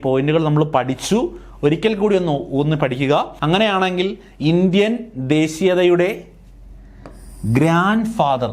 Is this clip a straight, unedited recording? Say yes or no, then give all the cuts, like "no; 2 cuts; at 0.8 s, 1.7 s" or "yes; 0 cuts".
no; 1 cut; at 3.3 s